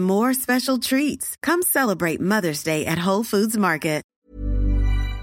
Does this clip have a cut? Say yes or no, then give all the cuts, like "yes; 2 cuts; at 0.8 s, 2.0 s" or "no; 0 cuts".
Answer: yes; 1 cut; at 4.1 s